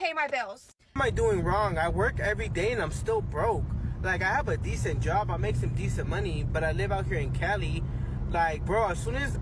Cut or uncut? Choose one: cut